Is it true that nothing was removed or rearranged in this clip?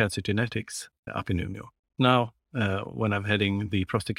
no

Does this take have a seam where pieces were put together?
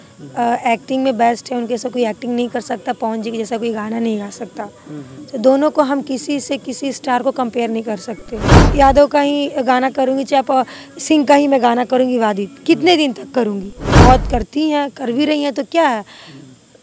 yes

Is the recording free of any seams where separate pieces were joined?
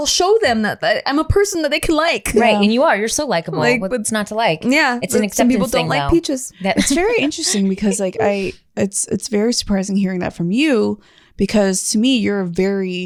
yes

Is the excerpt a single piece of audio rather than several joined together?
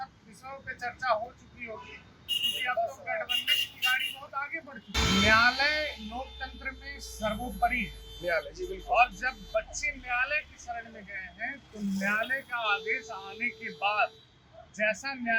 no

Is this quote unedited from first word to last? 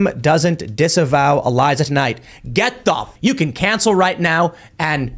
no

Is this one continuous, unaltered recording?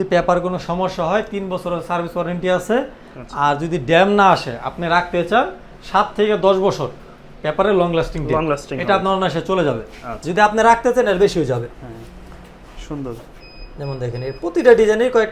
yes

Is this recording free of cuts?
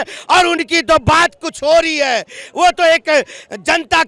yes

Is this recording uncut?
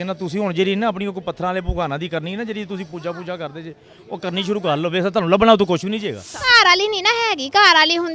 no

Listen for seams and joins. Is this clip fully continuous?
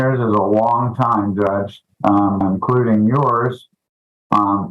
no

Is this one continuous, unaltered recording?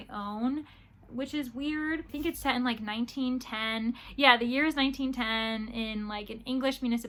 yes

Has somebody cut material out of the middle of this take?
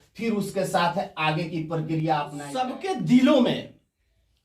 yes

